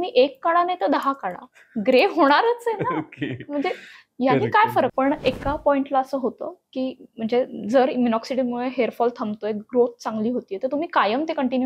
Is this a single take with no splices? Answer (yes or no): no